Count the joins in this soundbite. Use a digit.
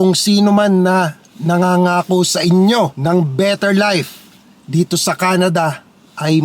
1